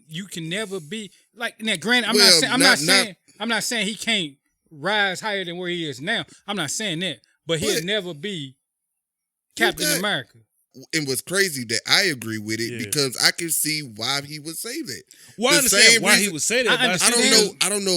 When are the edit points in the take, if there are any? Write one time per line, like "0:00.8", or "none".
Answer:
0:10.7